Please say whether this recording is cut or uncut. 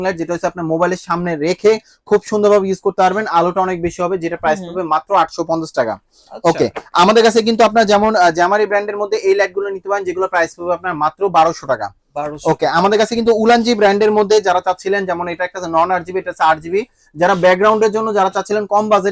uncut